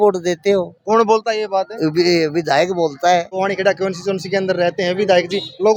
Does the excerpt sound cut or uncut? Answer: cut